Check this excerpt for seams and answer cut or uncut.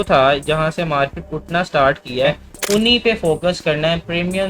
cut